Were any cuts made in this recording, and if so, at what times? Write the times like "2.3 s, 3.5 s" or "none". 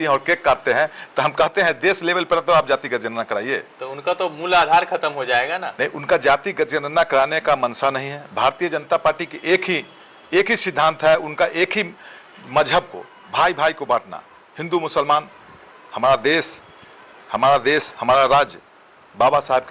none